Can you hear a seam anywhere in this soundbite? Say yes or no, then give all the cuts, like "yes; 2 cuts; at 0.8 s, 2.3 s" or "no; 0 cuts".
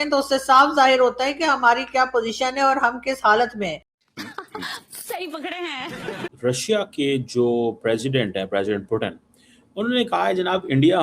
no; 0 cuts